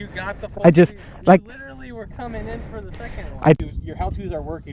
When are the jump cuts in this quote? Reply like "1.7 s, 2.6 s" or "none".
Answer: 3.6 s